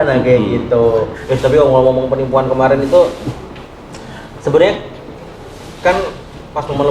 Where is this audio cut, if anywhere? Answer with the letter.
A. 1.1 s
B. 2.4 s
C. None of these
A